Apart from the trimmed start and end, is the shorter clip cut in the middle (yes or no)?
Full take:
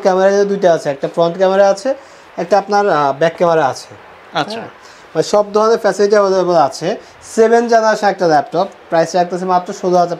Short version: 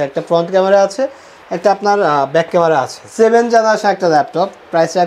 yes